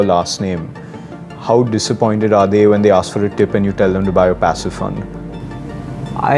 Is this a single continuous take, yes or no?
yes